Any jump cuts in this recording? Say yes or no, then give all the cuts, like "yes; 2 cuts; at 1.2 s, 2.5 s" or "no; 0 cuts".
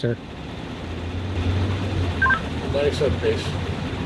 no; 0 cuts